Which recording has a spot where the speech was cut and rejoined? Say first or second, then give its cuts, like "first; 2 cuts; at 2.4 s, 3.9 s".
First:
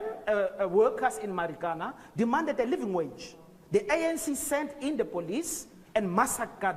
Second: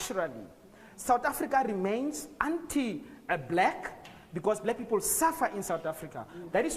second; 1 cut; at 5.8 s